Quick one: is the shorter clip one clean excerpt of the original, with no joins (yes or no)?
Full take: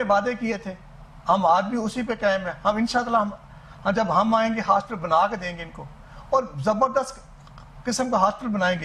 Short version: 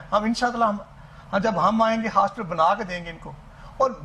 yes